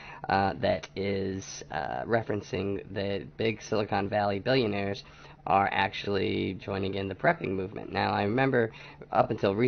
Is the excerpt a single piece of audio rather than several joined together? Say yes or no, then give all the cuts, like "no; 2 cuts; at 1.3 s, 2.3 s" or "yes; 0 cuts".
no; 1 cut; at 8.4 s